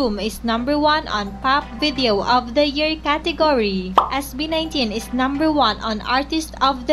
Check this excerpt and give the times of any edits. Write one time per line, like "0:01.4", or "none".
0:02.6